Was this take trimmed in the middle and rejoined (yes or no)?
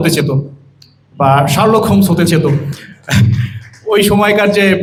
no